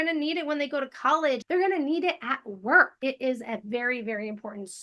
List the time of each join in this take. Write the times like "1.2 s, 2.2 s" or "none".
1.4 s, 2.9 s